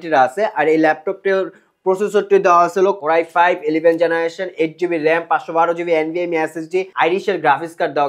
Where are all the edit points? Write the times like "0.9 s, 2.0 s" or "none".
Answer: 3.0 s, 6.9 s